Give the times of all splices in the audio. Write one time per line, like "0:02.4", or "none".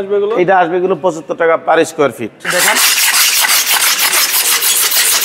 0:02.4